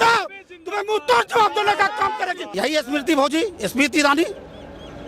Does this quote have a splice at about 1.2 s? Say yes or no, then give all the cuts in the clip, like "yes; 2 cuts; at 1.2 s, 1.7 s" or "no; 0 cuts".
no; 1 cut; at 2.4 s